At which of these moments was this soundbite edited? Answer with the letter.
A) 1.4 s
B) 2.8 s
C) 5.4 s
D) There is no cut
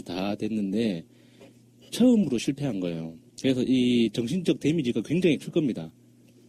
B